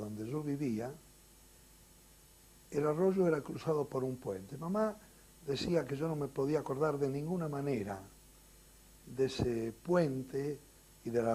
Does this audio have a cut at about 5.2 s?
no; 0 cuts

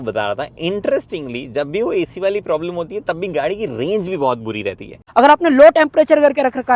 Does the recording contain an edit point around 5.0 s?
yes; 1 cut; at 5.0 s

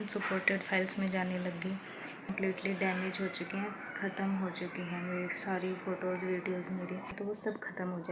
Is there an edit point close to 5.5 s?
no; 2 cuts; at 2.3 s, 7.1 s

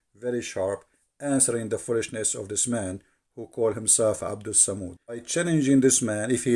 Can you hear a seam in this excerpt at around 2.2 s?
no; 1 cut; at 5.3 s

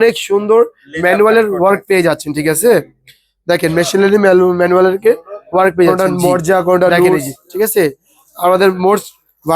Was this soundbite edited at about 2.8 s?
no; 1 cut; at 5.9 s

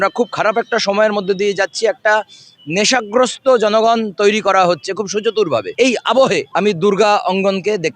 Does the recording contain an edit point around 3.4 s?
no; 2 cuts; at 5.7 s, 6.5 s

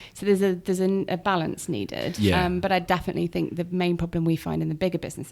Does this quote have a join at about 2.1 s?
yes; 1 cut; at 2.1 s

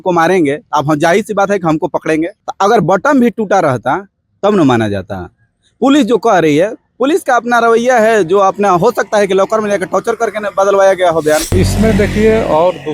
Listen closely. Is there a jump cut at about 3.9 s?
no; 1 cut; at 11.5 s

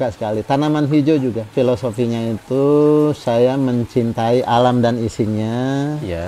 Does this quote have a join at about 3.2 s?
no; 1 cut; at 1.5 s

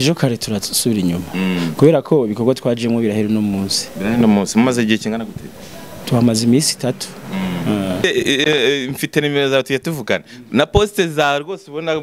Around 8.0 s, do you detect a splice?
yes; 1 cut; at 8.0 s

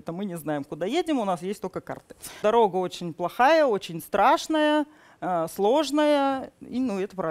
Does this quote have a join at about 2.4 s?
yes; 1 cut; at 2.4 s

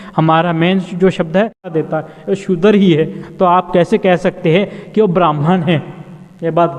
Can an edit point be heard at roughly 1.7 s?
yes; 1 cut; at 1.7 s

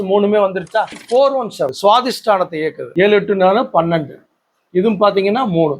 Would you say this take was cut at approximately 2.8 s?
yes; 2 cuts; at 1.0 s, 2.8 s

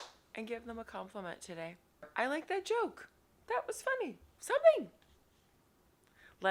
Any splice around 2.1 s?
yes; 1 cut; at 2.1 s

